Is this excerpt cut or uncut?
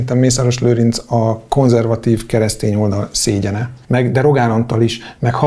cut